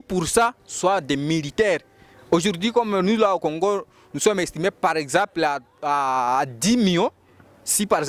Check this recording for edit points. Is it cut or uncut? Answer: uncut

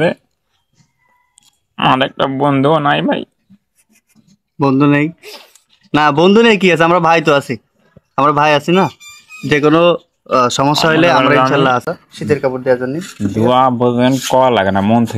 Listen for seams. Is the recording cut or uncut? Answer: cut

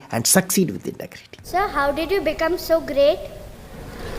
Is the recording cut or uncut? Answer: cut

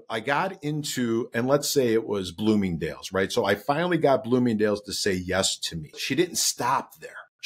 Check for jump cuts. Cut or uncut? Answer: cut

